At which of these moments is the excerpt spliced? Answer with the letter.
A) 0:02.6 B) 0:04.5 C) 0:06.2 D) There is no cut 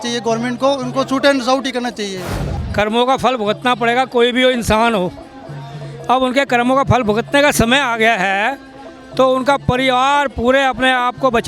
A